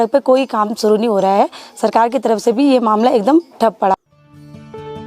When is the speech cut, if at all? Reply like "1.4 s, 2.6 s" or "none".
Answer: 3.9 s